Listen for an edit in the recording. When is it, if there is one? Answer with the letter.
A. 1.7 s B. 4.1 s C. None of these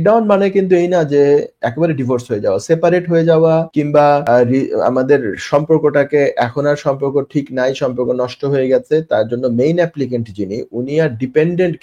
B